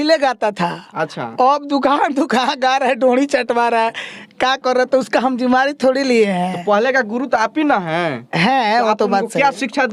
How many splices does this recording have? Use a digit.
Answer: 0